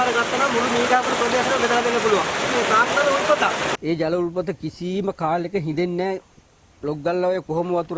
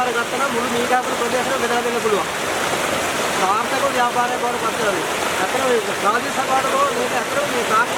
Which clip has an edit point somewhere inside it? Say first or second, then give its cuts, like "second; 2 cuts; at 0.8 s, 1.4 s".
first; 2 cuts; at 2.5 s, 3.7 s